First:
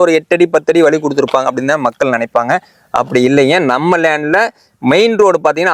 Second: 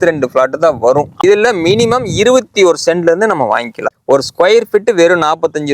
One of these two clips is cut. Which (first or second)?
second